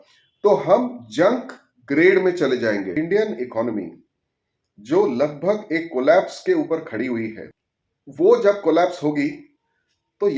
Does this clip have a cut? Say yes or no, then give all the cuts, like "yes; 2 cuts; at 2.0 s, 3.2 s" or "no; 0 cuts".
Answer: yes; 1 cut; at 2.9 s